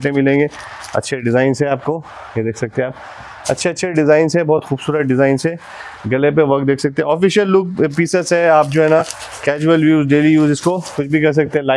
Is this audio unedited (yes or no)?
yes